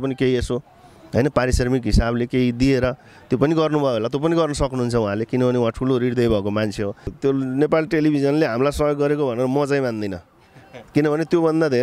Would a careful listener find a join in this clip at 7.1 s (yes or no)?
yes